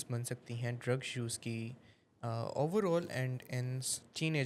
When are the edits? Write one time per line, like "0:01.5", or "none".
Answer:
none